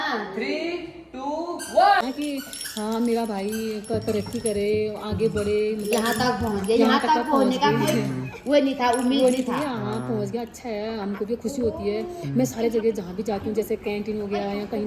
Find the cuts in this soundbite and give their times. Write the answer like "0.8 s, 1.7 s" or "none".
2.0 s